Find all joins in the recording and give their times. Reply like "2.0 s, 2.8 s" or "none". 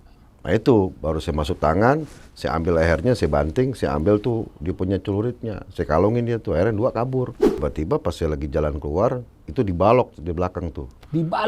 7.4 s